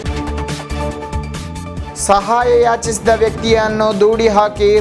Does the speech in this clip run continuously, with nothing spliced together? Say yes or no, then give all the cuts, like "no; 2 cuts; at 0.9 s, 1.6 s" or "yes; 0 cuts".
no; 1 cut; at 1.4 s